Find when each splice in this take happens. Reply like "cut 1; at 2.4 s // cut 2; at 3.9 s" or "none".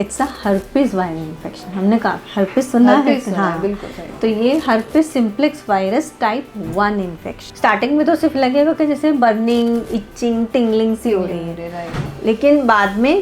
cut 1; at 7.4 s